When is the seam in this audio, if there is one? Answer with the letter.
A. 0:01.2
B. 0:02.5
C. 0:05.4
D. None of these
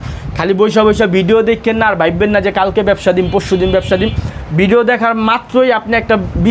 D